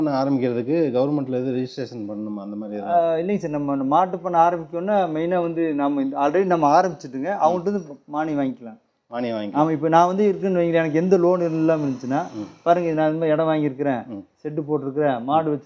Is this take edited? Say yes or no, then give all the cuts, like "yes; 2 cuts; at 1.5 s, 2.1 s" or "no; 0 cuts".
no; 0 cuts